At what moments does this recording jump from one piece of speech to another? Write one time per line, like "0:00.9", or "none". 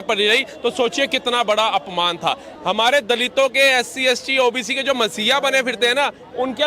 0:02.5